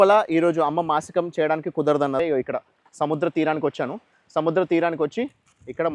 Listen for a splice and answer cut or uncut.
cut